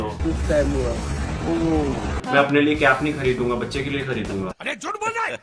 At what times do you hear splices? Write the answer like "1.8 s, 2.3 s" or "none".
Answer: 2.1 s